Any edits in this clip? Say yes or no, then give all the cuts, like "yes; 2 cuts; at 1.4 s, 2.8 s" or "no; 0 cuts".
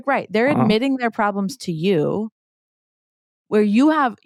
no; 0 cuts